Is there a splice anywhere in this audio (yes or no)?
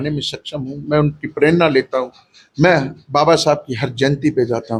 no